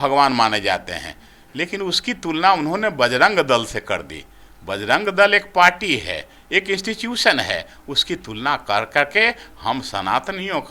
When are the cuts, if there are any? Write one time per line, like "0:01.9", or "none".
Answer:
none